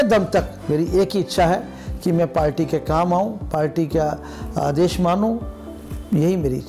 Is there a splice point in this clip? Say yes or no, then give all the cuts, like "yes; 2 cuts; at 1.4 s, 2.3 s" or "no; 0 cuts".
no; 0 cuts